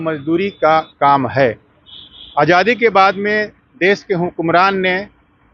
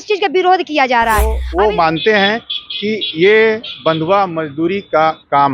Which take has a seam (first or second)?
second